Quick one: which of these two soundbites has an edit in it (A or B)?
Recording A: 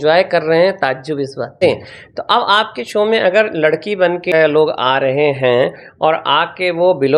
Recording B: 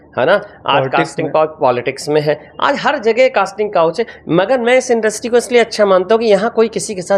A